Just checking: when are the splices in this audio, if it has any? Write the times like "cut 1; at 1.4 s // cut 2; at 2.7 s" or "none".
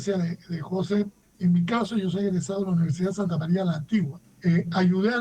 cut 1; at 1.2 s // cut 2; at 4.2 s